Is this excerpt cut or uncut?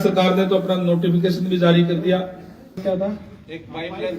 cut